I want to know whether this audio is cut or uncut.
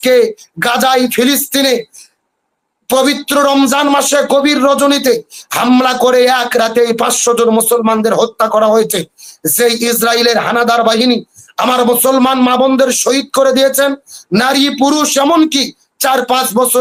uncut